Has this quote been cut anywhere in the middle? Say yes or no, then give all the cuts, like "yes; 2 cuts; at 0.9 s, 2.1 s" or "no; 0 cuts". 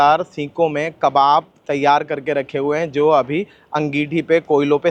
no; 0 cuts